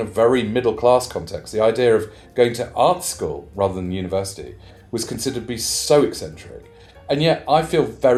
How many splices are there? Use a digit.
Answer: 0